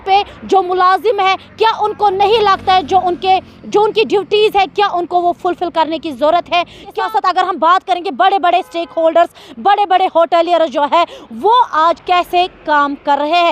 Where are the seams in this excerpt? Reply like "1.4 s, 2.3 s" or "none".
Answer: 6.9 s